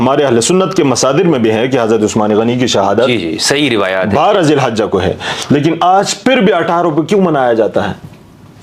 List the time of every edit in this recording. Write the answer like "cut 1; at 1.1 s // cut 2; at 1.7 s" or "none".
none